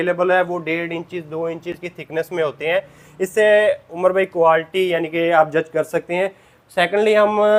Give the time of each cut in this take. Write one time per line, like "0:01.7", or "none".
none